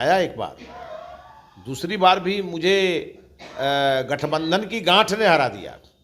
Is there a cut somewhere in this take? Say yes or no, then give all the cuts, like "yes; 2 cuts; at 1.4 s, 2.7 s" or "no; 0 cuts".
no; 0 cuts